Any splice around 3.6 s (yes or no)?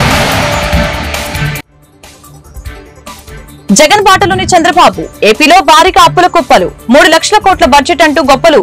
yes